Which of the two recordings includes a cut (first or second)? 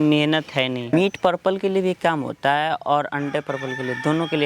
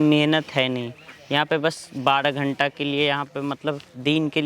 first